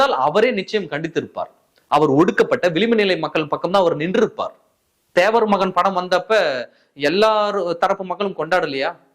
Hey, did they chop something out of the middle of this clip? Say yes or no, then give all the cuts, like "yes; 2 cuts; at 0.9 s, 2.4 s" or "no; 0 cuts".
yes; 1 cut; at 5.0 s